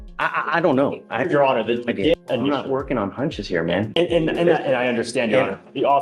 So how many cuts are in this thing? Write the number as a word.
one